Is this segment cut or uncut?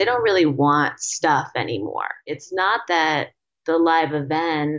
cut